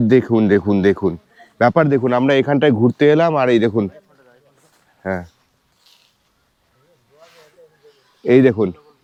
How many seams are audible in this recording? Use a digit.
0